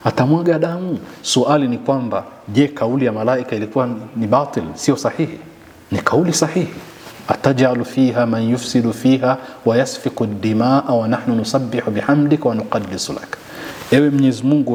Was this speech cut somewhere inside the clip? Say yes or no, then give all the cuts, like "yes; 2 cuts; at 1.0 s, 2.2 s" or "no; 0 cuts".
no; 0 cuts